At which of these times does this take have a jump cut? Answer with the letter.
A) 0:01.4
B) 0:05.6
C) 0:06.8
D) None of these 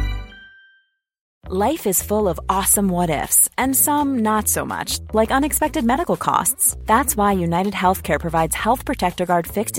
A